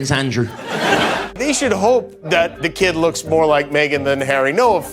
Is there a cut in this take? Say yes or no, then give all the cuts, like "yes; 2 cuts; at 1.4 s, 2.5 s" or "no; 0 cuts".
yes; 1 cut; at 1.3 s